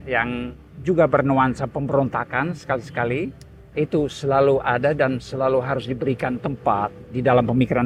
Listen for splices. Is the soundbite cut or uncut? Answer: uncut